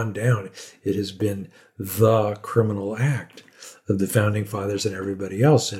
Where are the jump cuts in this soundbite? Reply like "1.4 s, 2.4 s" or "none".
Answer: none